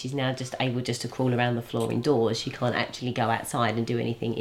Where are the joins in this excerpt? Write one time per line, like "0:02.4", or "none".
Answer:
none